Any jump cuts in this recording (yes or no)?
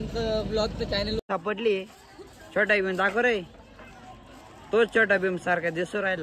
yes